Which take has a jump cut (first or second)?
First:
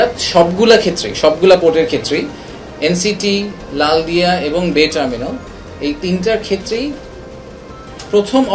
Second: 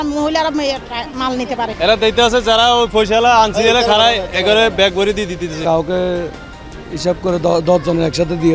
second